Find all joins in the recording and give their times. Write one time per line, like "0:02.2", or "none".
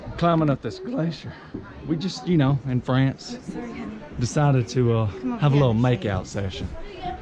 none